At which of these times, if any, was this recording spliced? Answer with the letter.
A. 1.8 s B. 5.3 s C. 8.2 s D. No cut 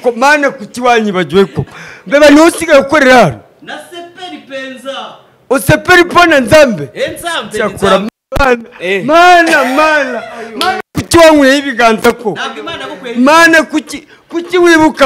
C